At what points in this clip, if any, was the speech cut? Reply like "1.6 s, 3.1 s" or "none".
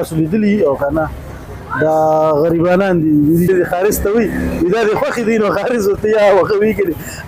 3.5 s